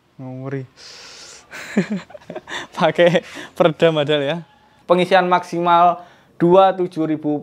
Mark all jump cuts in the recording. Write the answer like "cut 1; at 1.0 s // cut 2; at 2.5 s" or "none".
cut 1; at 4.7 s